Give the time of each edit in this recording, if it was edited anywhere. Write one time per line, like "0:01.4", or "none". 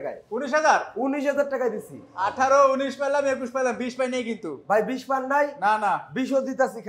none